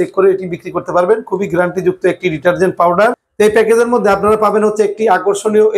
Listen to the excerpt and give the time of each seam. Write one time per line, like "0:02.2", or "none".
0:03.2